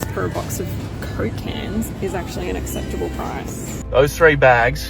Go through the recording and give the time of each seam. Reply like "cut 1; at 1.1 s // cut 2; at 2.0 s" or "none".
cut 1; at 3.7 s